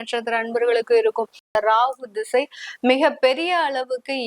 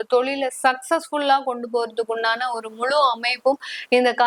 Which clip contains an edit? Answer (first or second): first